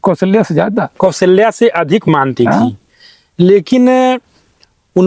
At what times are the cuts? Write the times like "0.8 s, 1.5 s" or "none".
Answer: none